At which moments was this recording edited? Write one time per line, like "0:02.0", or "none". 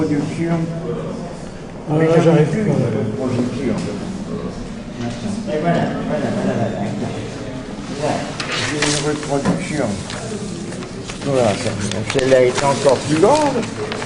none